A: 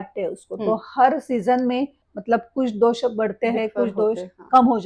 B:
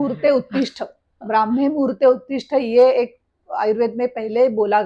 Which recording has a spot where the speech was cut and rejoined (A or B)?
A